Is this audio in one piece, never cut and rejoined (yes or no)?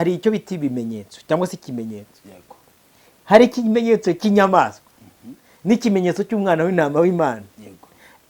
yes